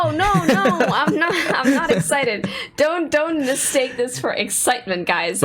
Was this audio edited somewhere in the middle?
no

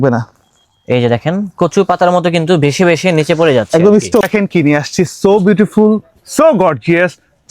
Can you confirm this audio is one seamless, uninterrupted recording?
no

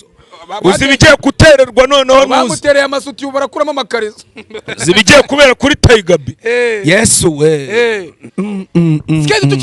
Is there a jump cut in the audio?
no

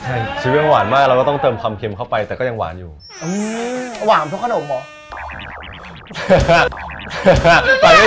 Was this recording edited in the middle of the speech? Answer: no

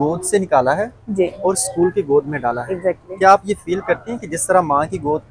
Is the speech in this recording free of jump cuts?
yes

